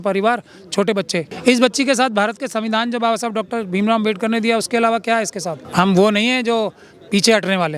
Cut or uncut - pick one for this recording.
cut